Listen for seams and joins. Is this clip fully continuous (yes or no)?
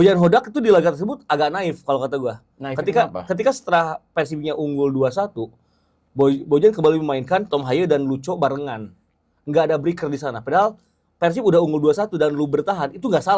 yes